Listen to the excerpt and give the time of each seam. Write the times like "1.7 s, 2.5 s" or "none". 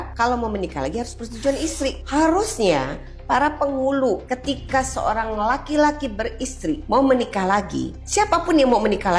none

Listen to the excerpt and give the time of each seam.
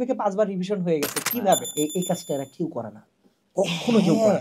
1.7 s

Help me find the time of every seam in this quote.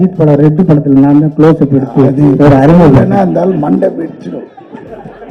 none

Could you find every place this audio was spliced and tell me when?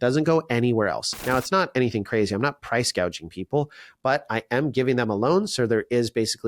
1.1 s

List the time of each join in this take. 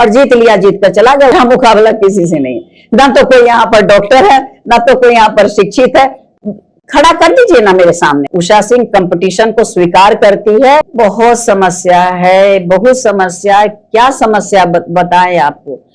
1.3 s, 8.3 s, 10.9 s

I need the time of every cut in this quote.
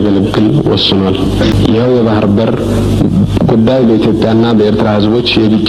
none

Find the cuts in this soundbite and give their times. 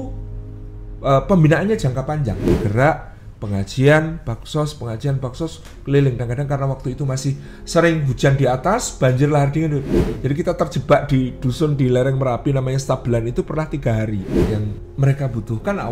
2.4 s, 6.2 s, 14.3 s

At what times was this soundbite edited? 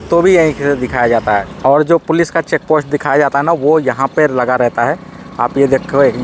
1.5 s

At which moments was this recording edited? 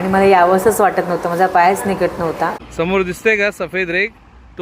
2.6 s

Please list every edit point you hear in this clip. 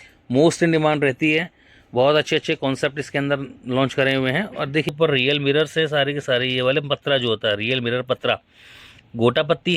4.9 s

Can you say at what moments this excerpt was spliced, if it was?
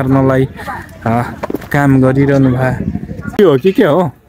3.4 s

